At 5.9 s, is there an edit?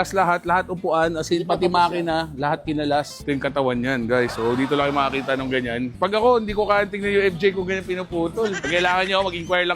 yes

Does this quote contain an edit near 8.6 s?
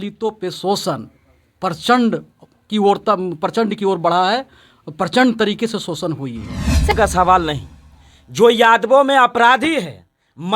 no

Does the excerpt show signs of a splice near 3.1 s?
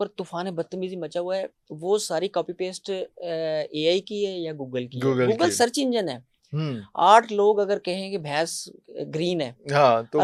no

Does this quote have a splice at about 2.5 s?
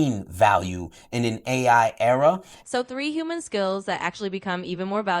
yes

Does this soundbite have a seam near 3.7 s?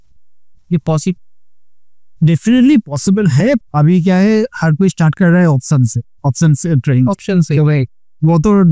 yes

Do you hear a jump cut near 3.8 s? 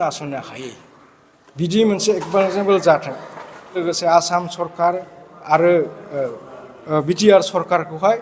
yes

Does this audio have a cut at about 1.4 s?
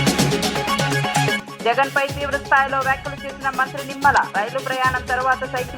yes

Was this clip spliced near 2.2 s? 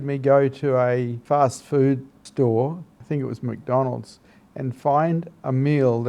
yes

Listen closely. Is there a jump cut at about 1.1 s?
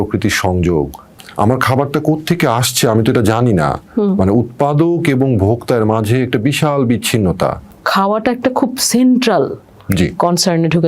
yes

